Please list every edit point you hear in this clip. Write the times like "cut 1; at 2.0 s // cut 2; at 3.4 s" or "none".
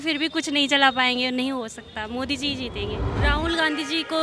cut 1; at 3.1 s

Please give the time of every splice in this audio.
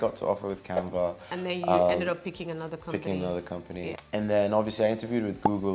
none

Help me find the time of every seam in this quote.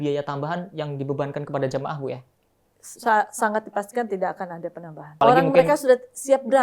cut 1; at 5.1 s

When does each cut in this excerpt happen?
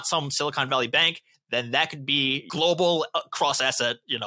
cut 1; at 2.5 s

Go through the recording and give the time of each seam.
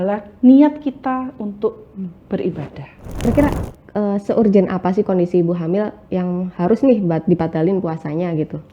cut 1; at 3.3 s

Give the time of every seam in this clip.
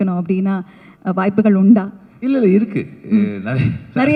none

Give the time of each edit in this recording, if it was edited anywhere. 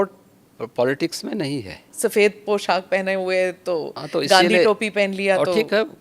cut 1; at 1.9 s

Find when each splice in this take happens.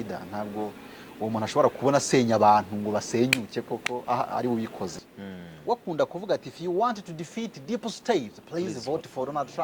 cut 1; at 5.1 s

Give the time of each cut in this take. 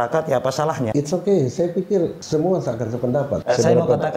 cut 1; at 0.9 s // cut 2; at 2.2 s // cut 3; at 3.4 s

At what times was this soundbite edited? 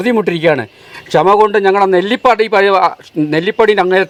none

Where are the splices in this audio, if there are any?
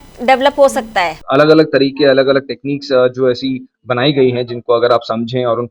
cut 1; at 1.2 s

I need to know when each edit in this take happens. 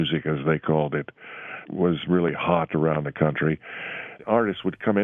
cut 1; at 1.6 s // cut 2; at 4.2 s

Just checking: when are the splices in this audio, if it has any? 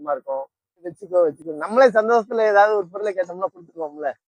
cut 1; at 0.9 s

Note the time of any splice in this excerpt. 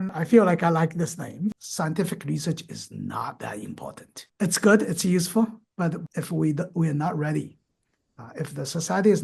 cut 1; at 1.7 s // cut 2; at 6.1 s

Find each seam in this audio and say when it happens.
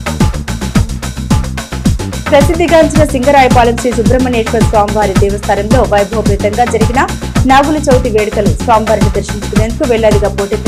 none

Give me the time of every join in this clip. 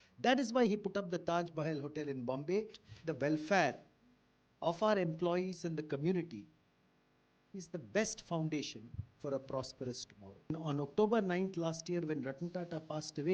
cut 1; at 2.9 s // cut 2; at 10.5 s

